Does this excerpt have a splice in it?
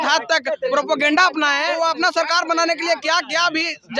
yes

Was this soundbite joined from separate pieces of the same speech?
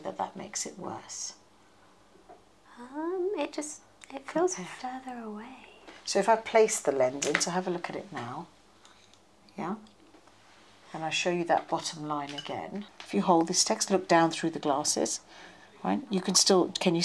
yes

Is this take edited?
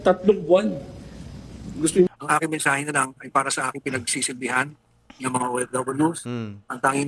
yes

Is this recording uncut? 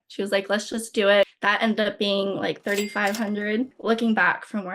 no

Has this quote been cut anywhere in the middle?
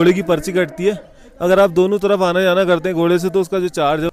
no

